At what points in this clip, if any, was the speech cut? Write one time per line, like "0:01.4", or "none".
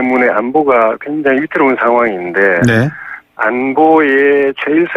none

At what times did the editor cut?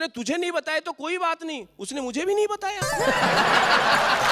none

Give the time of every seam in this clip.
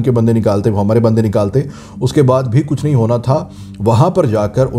none

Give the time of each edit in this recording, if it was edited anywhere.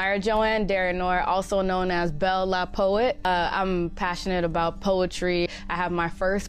0:03.3

